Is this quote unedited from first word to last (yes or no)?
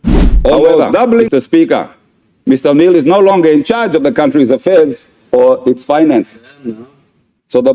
no